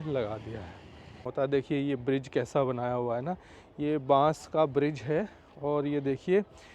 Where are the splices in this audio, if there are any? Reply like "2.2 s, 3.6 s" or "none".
1.3 s